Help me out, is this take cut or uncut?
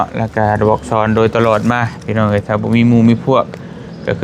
uncut